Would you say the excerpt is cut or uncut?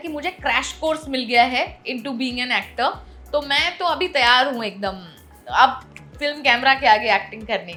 uncut